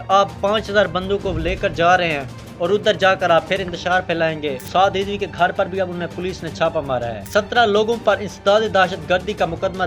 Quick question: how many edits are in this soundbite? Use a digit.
2